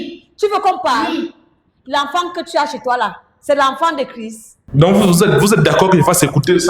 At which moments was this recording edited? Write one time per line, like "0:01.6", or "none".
0:04.6